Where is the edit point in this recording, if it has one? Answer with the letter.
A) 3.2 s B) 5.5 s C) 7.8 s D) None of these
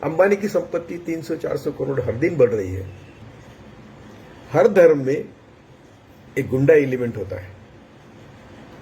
A